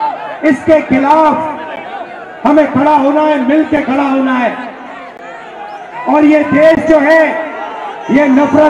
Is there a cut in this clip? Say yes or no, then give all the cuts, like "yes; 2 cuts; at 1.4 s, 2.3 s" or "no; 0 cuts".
no; 0 cuts